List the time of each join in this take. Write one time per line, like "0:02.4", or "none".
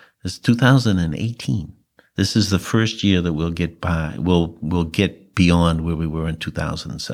none